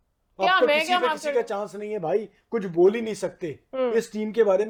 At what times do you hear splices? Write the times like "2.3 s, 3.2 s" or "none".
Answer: none